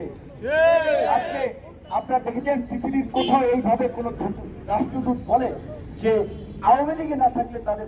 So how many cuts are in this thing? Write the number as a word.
zero